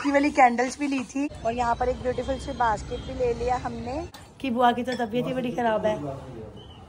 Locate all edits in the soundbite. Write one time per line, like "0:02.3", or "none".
0:01.3
0:04.2